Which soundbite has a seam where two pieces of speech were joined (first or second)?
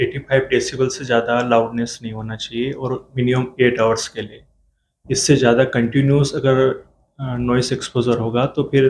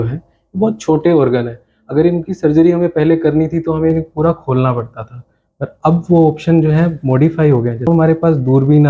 second